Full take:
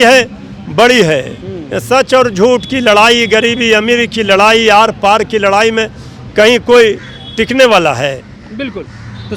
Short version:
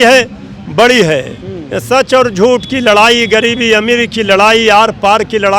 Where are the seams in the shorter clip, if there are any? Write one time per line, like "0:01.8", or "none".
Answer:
none